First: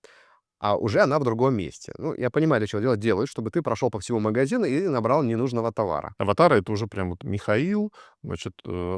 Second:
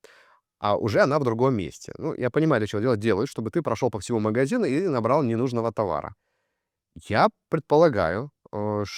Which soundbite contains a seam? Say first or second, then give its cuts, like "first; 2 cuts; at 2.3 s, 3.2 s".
first; 1 cut; at 6.1 s